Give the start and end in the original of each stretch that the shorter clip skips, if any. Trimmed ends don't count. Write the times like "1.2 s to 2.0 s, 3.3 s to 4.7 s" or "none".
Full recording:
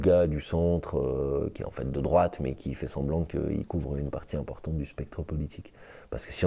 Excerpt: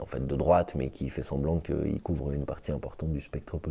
none